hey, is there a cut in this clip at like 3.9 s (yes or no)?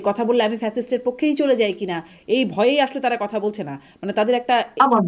no